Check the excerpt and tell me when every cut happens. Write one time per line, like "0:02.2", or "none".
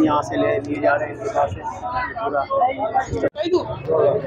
none